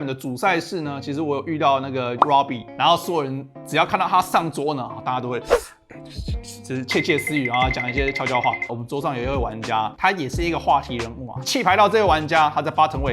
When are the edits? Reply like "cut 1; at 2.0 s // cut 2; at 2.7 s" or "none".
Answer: cut 1; at 2.6 s // cut 2; at 8.6 s // cut 3; at 11.3 s

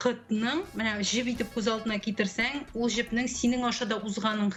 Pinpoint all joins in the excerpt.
none

